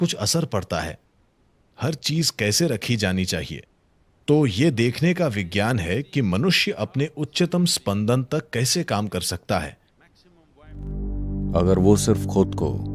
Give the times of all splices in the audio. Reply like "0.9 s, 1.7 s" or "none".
10.8 s